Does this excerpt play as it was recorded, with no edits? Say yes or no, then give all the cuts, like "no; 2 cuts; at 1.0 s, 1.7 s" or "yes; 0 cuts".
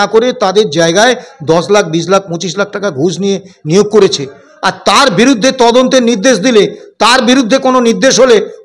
yes; 0 cuts